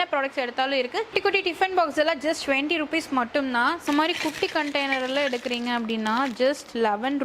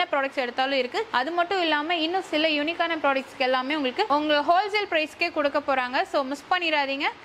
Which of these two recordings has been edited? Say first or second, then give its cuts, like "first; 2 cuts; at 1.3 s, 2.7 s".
first; 2 cuts; at 1.1 s, 3.8 s